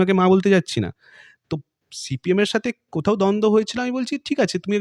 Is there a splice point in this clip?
no; 0 cuts

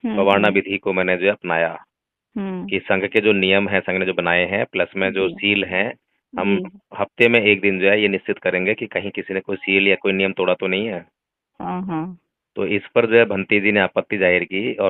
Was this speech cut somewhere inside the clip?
no; 0 cuts

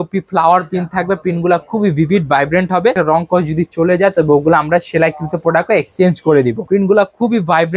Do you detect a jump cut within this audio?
yes; 2 cuts; at 2.9 s, 6.6 s

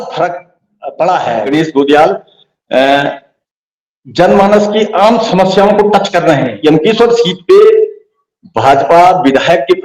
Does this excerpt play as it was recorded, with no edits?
no; 2 cuts; at 1.5 s, 6.5 s

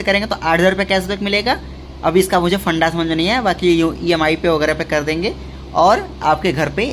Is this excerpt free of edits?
yes; 0 cuts

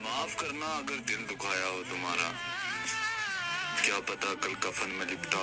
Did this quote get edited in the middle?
no; 0 cuts

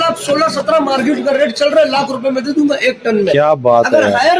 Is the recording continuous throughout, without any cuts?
yes; 0 cuts

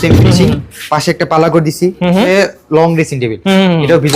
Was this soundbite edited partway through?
yes; 1 cut; at 2.3 s

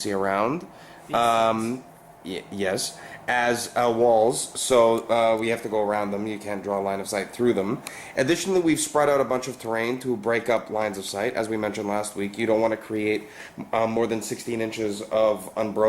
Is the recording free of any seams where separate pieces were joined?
no; 1 cut; at 10.2 s

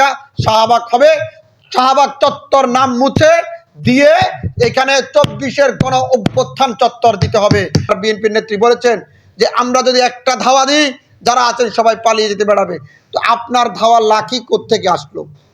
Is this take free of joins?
no; 1 cut; at 7.9 s

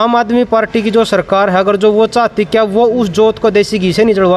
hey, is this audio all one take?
yes; 0 cuts

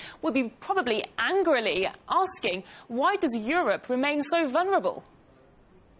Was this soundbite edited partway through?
yes; 1 cut; at 3.5 s

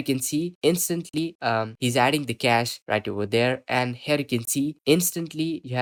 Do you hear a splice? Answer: no; 0 cuts

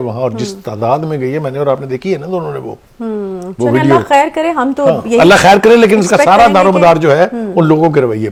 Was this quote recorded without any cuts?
yes; 0 cuts

